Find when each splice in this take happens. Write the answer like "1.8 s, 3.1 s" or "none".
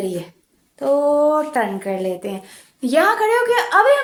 none